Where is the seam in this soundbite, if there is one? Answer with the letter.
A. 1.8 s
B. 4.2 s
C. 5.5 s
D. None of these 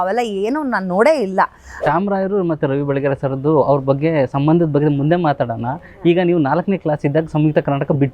A